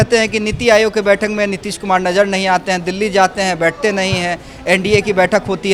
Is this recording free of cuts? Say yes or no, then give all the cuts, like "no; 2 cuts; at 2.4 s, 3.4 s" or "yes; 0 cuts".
yes; 0 cuts